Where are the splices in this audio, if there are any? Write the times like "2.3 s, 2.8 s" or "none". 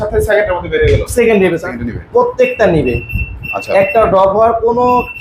1.6 s

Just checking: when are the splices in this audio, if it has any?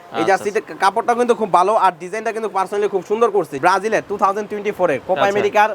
3.5 s

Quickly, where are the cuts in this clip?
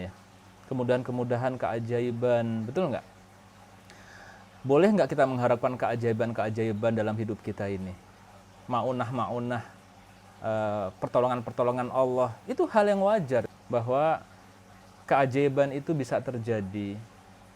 12.4 s, 13.5 s

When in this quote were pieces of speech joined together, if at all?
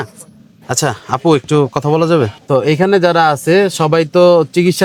none

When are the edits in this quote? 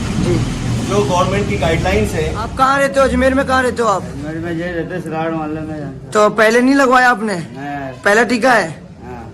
2.5 s

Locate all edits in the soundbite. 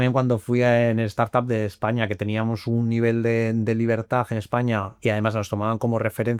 none

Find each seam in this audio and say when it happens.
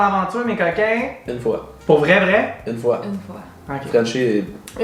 none

